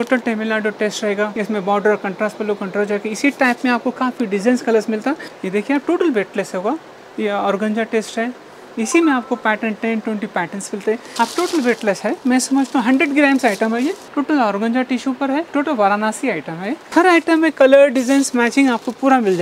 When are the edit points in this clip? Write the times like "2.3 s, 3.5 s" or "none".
1.3 s, 5.3 s, 11.1 s, 14.0 s, 15.5 s, 16.9 s